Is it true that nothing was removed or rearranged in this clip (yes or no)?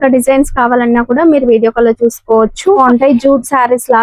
no